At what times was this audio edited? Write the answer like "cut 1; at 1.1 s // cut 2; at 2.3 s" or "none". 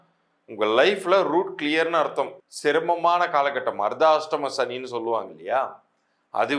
cut 1; at 2.4 s